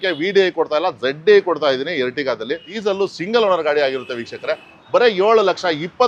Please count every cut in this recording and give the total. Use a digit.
1